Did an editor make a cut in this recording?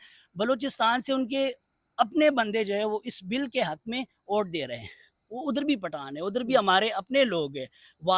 no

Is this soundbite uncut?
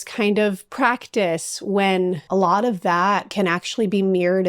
no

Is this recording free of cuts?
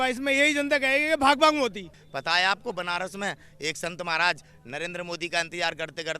no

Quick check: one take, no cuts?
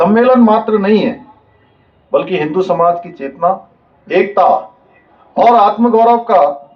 yes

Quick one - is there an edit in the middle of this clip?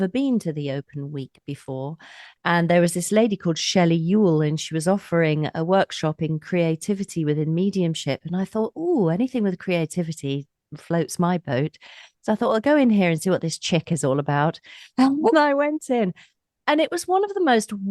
yes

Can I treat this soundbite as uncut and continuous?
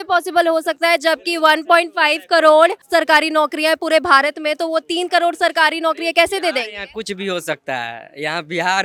yes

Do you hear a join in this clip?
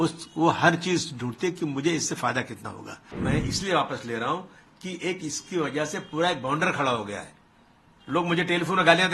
yes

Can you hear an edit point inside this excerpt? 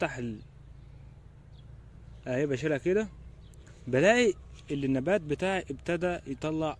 no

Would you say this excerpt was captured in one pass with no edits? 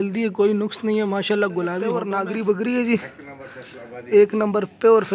no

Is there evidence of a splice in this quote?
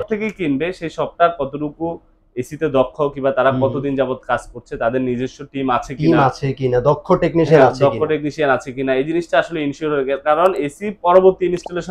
no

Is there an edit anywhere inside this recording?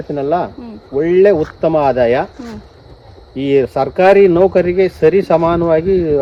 no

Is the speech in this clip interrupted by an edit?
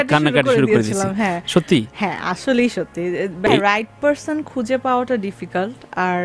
yes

